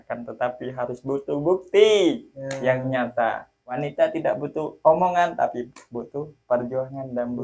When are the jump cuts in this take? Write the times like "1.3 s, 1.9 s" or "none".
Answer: 3.8 s